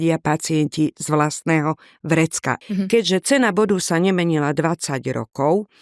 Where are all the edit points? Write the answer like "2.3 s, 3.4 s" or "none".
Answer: 2.6 s